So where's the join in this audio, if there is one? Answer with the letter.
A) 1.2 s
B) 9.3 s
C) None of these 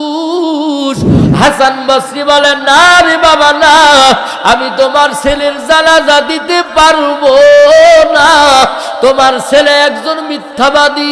A